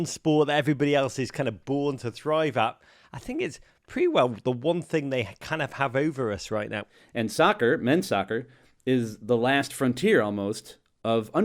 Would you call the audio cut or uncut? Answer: cut